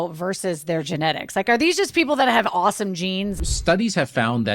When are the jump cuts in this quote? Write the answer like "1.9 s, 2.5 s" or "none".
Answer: 3.4 s